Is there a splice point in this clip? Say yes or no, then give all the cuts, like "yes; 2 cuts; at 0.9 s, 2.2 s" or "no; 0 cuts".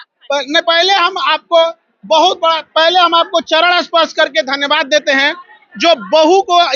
no; 0 cuts